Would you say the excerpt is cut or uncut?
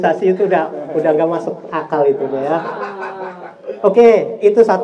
uncut